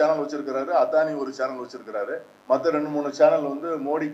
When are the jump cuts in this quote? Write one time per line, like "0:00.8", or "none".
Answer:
0:02.3